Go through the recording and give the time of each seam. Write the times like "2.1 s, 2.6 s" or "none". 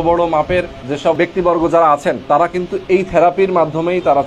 1.0 s, 2.2 s

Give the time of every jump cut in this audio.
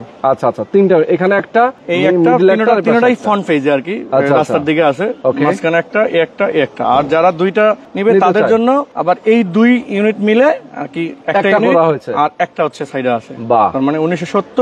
7.9 s, 8.9 s, 11.1 s

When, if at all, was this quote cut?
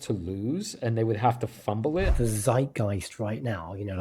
2.1 s

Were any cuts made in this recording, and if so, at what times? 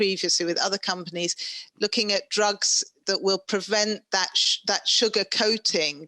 none

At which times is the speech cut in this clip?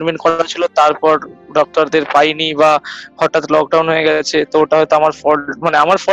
none

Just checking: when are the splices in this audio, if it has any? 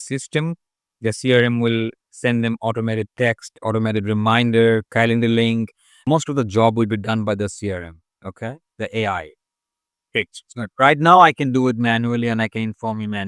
6.1 s

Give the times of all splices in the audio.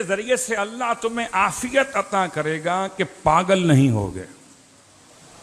none

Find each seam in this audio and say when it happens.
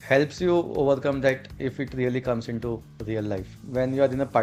3.5 s

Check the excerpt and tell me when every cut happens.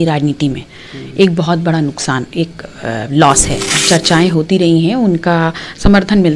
3.8 s

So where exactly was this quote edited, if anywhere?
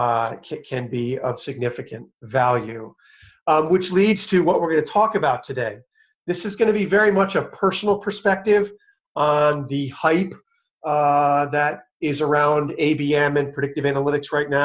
6.8 s

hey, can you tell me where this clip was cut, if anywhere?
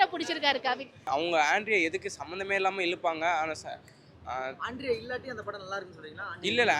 1.1 s

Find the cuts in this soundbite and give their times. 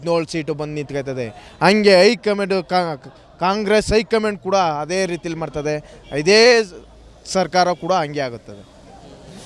none

